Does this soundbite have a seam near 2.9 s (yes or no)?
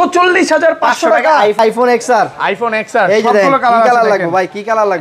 no